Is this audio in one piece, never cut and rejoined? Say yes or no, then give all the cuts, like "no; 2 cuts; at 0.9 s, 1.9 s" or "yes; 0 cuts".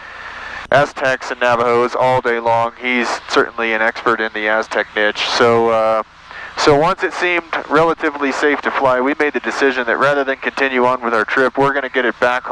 yes; 0 cuts